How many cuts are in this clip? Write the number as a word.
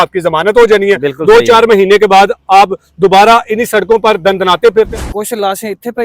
one